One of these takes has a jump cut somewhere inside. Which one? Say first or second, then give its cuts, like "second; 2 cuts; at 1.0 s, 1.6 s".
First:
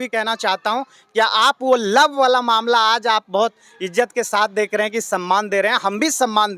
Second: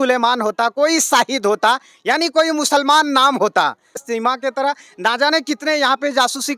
second; 1 cut; at 4.0 s